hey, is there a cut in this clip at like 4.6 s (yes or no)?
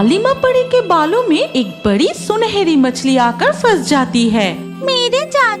yes